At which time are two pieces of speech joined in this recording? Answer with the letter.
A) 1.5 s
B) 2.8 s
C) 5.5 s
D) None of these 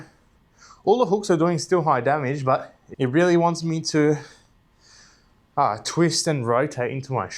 B